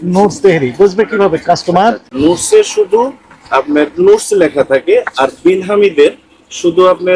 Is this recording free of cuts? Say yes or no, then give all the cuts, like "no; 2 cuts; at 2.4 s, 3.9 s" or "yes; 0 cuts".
yes; 0 cuts